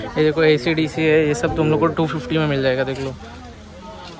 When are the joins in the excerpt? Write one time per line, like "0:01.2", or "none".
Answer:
none